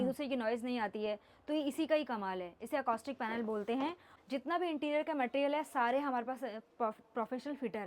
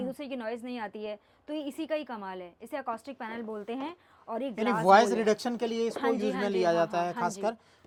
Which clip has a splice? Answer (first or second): first